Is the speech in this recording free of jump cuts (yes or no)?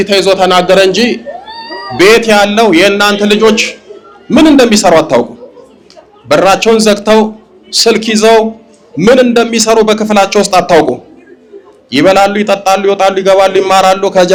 yes